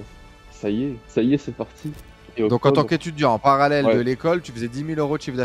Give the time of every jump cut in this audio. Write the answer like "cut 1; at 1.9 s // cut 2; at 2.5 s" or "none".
cut 1; at 1.0 s // cut 2; at 2.0 s